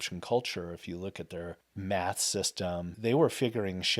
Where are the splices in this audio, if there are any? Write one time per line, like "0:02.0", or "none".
0:01.6
0:03.0